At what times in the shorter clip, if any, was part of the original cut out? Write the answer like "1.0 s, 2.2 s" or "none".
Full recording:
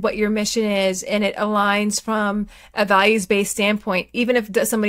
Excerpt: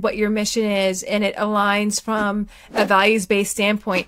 none